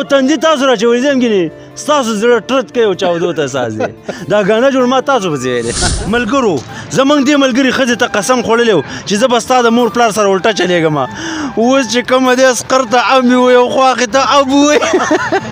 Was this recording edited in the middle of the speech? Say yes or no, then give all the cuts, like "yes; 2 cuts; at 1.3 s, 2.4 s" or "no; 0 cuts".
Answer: yes; 1 cut; at 5.8 s